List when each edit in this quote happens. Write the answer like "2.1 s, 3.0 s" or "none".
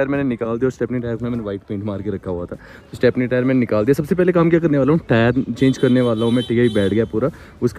none